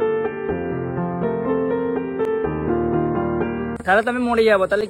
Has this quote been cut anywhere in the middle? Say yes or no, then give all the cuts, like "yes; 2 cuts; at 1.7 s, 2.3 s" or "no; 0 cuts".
no; 0 cuts